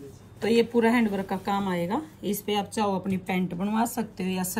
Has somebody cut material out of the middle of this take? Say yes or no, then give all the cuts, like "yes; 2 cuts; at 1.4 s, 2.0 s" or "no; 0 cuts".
no; 0 cuts